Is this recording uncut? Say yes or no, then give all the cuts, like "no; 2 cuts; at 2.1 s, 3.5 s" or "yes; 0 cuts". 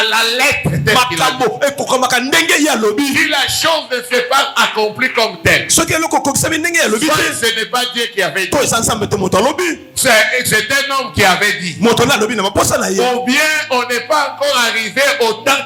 yes; 0 cuts